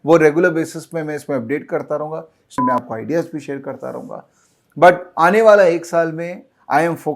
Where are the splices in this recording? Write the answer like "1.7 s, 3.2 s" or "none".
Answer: 2.6 s